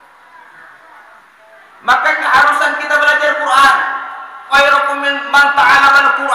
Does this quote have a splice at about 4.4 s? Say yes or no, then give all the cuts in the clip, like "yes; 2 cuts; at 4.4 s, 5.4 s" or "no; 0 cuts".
yes; 1 cut; at 4.4 s